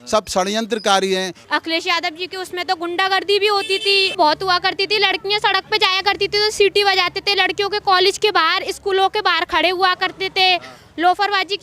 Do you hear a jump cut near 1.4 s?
yes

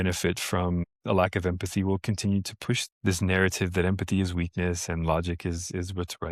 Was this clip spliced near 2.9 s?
yes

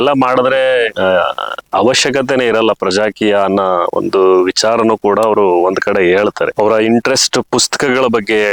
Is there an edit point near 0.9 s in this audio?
no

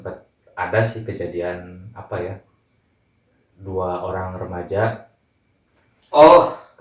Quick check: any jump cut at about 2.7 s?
no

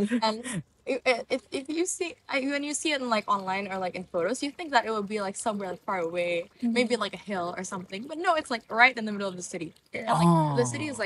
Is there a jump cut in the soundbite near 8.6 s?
no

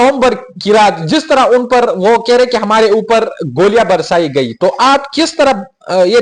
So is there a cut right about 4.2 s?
no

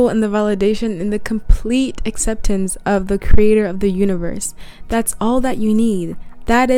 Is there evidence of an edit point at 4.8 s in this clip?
no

